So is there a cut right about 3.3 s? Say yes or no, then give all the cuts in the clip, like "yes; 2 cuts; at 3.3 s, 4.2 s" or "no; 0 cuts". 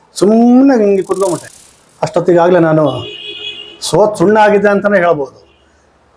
no; 1 cut; at 1.5 s